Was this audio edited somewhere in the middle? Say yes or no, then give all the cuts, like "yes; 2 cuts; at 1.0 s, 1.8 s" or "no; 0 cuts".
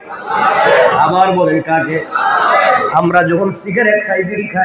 no; 0 cuts